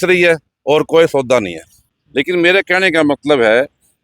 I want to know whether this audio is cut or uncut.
cut